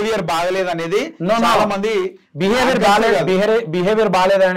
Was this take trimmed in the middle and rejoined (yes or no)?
no